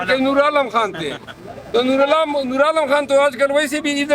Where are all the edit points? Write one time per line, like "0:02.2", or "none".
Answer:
none

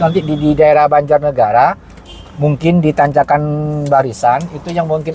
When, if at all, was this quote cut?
none

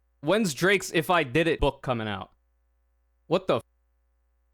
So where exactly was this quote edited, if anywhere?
0:01.6

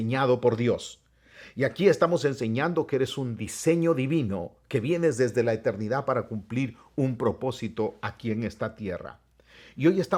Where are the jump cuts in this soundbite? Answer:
none

